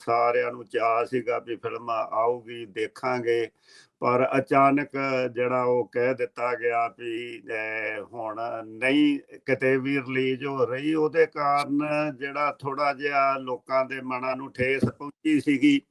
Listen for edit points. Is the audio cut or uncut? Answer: uncut